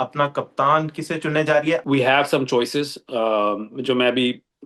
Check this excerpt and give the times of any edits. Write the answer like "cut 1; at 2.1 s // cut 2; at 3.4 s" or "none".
cut 1; at 1.8 s